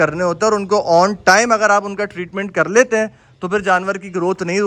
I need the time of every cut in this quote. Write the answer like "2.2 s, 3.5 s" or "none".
none